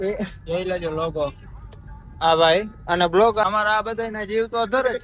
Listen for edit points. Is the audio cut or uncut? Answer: cut